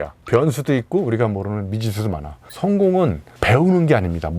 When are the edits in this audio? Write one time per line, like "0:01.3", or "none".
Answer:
0:02.4

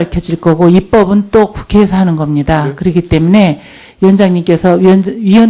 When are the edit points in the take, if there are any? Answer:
none

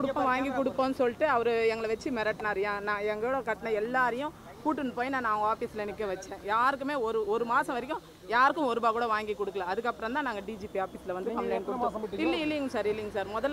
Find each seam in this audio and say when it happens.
0:12.0

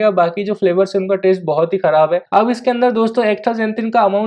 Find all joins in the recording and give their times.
0:02.2

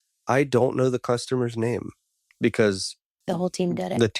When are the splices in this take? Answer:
0:02.2
0:03.1

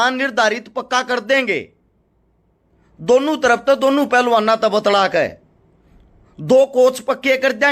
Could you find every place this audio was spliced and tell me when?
none

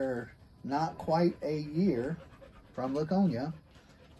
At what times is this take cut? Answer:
none

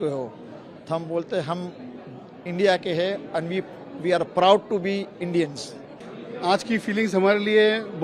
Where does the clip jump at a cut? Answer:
none

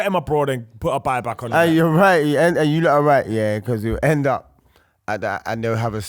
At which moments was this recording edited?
0:01.5

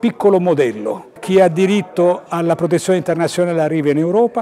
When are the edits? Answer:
0:01.1

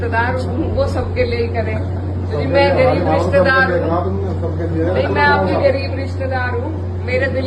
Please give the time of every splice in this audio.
none

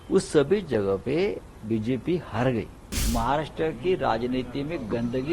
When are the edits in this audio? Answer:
0:03.0

